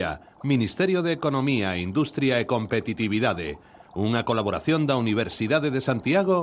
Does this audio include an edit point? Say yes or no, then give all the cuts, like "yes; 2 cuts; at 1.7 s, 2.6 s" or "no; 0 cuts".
no; 0 cuts